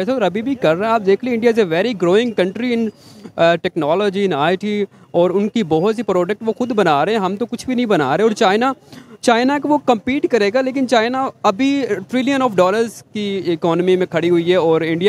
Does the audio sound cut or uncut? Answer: uncut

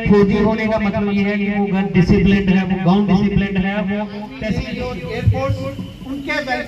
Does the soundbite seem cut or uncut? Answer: cut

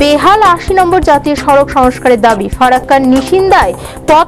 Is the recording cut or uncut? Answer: uncut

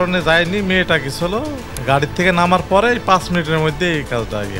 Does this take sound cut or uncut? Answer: cut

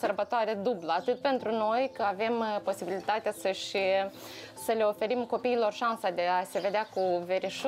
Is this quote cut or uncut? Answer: uncut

